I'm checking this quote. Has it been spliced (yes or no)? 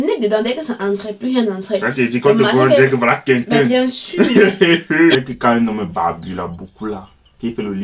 yes